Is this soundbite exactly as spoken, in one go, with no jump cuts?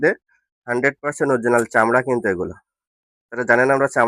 yes; 0 cuts

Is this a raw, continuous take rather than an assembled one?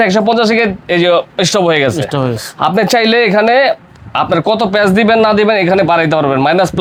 yes; 0 cuts

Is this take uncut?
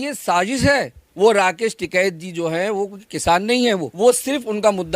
no; 2 cuts; at 1.0 s, 3.9 s

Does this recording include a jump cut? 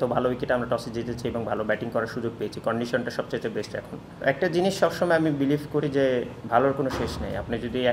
yes; 1 cut; at 4.2 s

